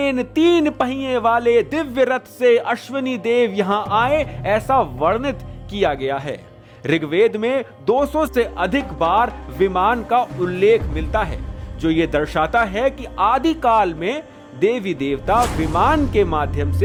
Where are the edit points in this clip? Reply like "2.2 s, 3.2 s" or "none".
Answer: none

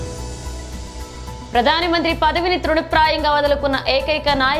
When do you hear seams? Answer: none

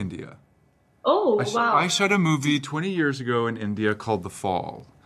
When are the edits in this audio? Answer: none

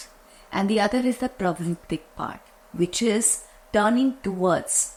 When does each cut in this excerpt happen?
none

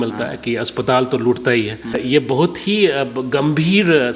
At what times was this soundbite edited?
2.0 s

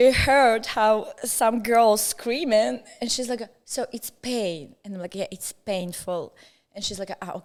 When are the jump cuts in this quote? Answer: none

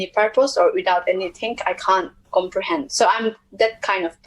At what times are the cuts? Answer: 2.2 s

